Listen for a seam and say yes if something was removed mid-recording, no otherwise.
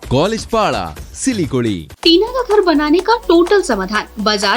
yes